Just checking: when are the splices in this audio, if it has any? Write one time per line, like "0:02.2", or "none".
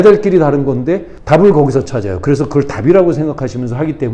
0:01.1